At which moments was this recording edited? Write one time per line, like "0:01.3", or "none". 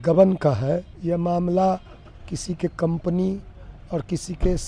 0:00.9